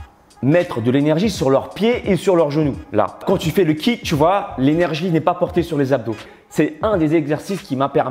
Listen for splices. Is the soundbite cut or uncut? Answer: cut